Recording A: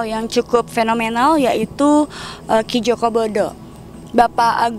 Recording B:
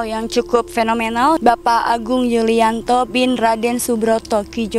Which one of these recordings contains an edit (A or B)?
B